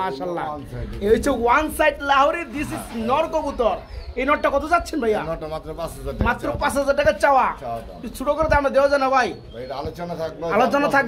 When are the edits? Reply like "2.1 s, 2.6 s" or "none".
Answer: none